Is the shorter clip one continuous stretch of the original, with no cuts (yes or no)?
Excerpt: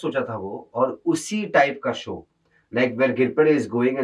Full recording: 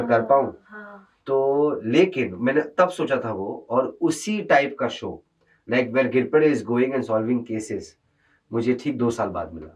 yes